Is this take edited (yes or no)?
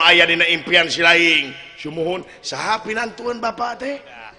yes